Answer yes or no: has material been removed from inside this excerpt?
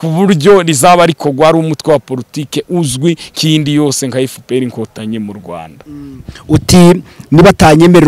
no